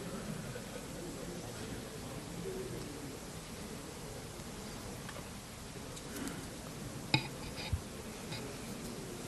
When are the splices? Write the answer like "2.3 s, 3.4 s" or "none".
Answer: none